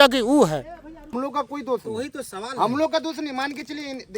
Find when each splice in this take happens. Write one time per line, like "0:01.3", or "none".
0:01.1

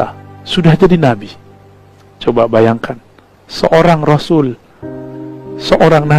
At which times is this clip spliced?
none

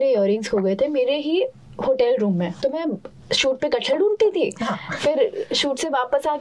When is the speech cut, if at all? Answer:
0:02.6

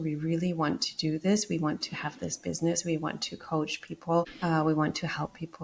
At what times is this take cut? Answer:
none

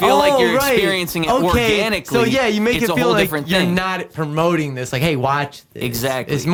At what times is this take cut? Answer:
none

